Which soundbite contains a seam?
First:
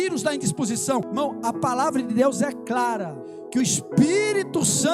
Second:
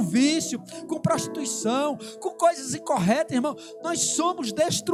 first; 2 cuts; at 1.1 s, 3.6 s

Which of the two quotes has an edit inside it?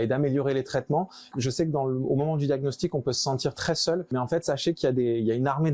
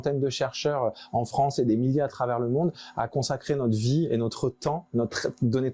first; 2 cuts; at 1.3 s, 4.1 s

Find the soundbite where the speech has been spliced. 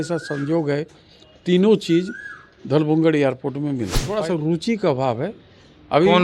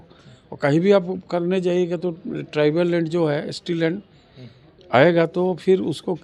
first; 1 cut; at 4.1 s

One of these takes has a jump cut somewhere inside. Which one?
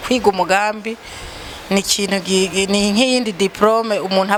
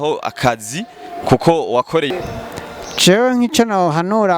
second; 1 cut; at 2.1 s

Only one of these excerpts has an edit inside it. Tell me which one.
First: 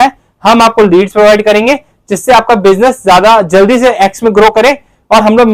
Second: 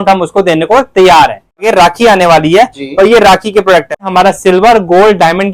second; 2 cuts; at 1.7 s, 4.0 s

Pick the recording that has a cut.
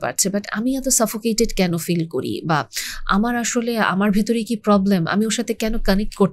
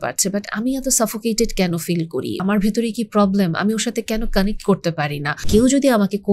second; 2 cuts; at 2.4 s, 5.4 s

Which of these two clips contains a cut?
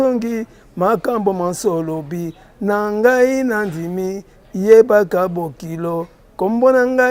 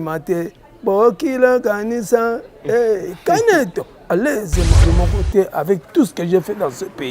second; 1 cut; at 4.8 s

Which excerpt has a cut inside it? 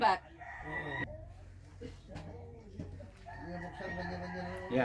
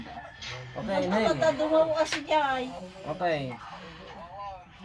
first; 1 cut; at 1.0 s

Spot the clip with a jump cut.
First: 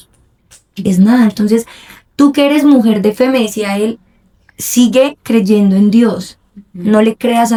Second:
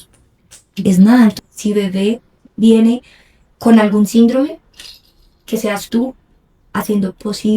second; 1 cut; at 1.4 s

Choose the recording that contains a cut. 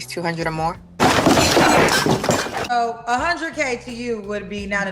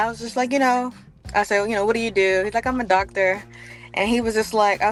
first; 2 cuts; at 1.0 s, 2.8 s

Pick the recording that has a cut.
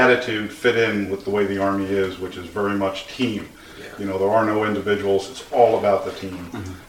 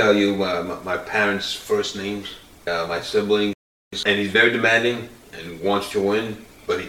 second; 2 cuts; at 2.6 s, 3.9 s

